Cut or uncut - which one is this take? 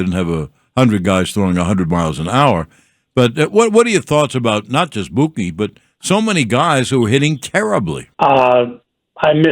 cut